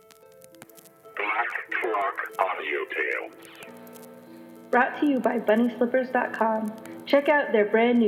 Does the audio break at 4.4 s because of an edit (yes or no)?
no